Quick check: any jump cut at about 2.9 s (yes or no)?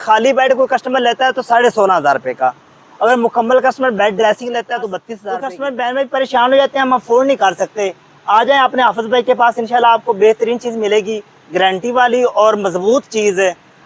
no